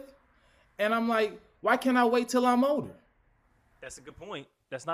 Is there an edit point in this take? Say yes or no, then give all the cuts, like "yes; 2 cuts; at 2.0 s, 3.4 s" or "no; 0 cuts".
no; 0 cuts